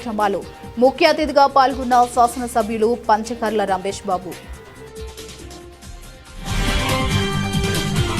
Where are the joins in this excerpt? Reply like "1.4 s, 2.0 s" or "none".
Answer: 4.4 s